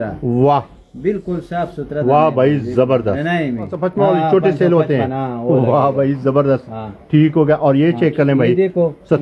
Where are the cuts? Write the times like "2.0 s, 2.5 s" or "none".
3.8 s

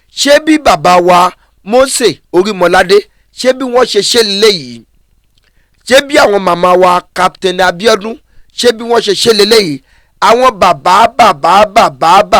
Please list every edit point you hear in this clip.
none

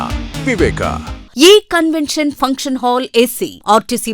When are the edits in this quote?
1.2 s

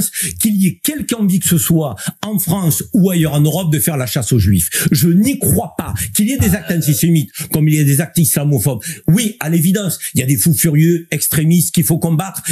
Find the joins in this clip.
none

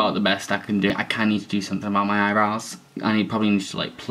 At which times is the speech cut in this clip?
0.9 s

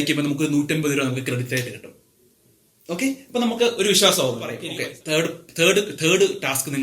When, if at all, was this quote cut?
4.6 s

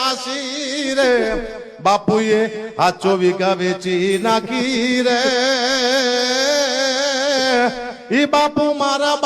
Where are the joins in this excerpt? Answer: none

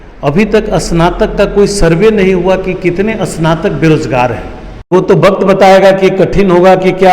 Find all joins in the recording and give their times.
4.9 s

